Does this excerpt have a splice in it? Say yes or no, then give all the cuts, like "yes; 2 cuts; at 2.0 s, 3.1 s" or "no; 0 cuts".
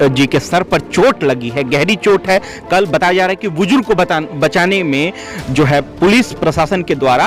no; 0 cuts